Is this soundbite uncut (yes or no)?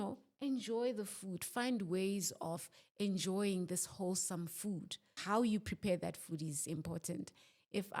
no